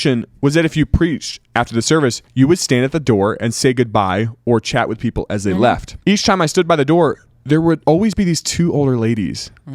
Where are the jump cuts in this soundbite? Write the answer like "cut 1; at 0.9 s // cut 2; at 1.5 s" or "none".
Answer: cut 1; at 2.2 s // cut 2; at 5.9 s // cut 3; at 7.8 s